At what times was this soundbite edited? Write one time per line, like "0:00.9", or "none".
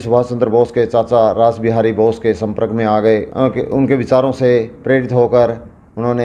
0:03.3